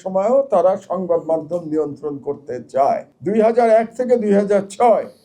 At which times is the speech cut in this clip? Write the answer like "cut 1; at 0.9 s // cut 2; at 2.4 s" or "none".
cut 1; at 3.1 s

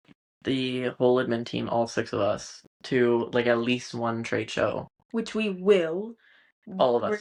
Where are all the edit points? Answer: none

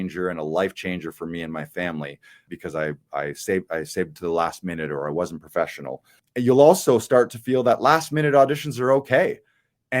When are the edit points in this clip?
cut 1; at 2.5 s // cut 2; at 6.2 s

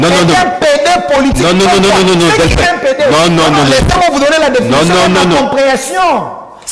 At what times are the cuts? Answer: none

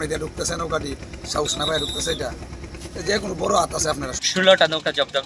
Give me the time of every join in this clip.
cut 1; at 4.1 s

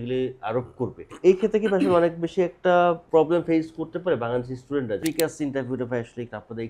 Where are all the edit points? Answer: cut 1; at 1.0 s // cut 2; at 3.0 s // cut 3; at 5.0 s

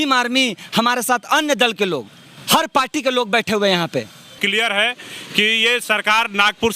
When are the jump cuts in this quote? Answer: cut 1; at 4.3 s

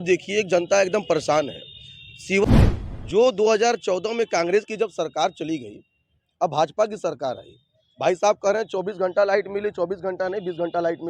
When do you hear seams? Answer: cut 1; at 2.4 s

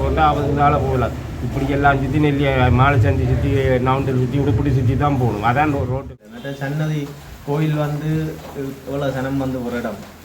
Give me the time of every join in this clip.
cut 1; at 6.1 s

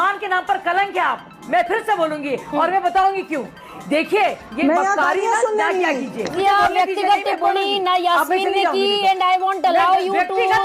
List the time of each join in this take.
cut 1; at 6.3 s

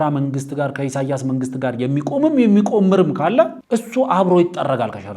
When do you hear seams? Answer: cut 1; at 3.6 s

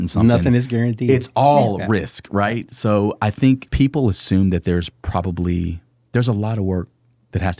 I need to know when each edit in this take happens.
cut 1; at 3.7 s

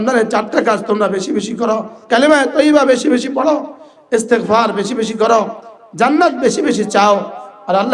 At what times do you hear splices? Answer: cut 1; at 2.0 s

